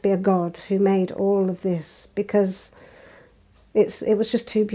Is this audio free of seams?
yes; 0 cuts

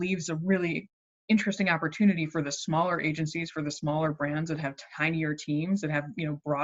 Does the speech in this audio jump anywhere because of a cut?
no; 0 cuts

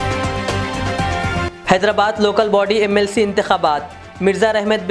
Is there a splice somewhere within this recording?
yes; 1 cut; at 1.1 s

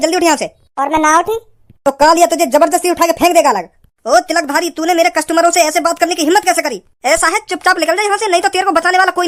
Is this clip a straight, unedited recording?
yes; 0 cuts

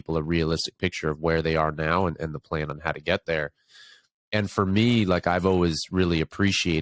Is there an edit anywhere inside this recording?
no; 0 cuts

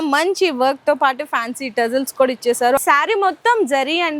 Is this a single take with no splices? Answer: no; 1 cut; at 2.8 s

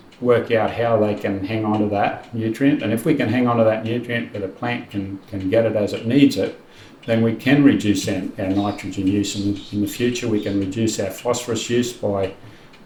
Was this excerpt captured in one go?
yes; 0 cuts

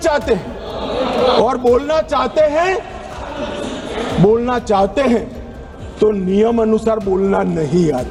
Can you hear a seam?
no; 0 cuts

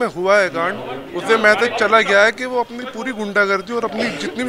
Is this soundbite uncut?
yes; 0 cuts

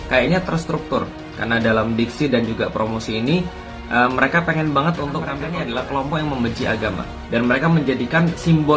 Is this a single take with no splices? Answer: no; 1 cut; at 5.4 s

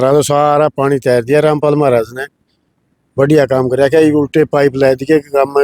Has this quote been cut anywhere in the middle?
no; 0 cuts

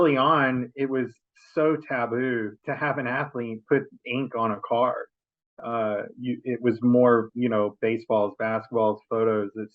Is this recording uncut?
no; 1 cut; at 2.6 s

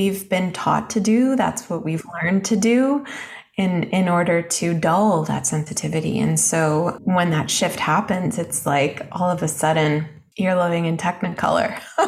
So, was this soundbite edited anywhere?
yes; 2 cuts; at 7.0 s, 10.2 s

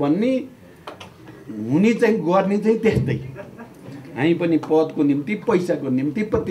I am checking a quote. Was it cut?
no; 0 cuts

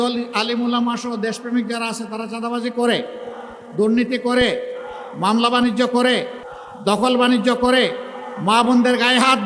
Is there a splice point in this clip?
no; 0 cuts

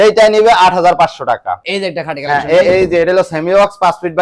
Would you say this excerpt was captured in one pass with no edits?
yes; 0 cuts

